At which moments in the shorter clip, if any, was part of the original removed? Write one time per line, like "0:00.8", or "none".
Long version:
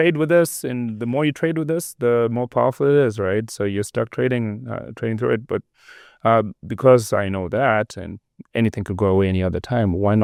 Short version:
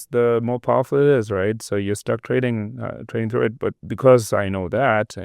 0:03.9